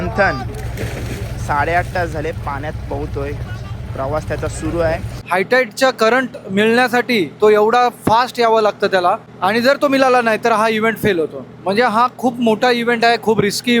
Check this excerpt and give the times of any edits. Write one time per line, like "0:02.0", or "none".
0:05.1
0:09.3